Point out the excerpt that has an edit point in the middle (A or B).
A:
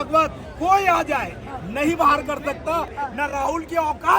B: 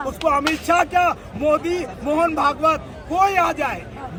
A